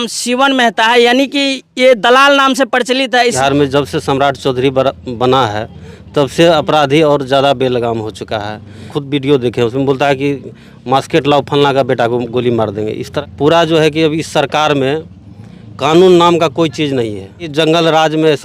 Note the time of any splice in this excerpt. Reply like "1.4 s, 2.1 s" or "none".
3.4 s, 8.9 s, 13.1 s, 17.5 s